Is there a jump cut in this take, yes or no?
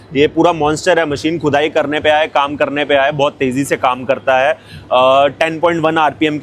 no